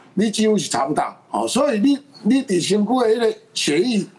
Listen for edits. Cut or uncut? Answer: cut